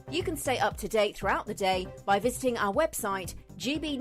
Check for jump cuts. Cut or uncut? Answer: uncut